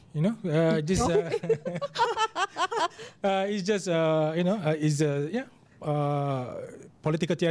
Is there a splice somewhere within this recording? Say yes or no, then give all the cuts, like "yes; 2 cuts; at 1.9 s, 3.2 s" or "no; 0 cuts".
no; 0 cuts